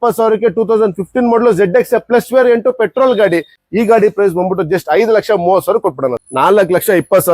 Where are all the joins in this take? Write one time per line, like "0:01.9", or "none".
0:03.6
0:06.2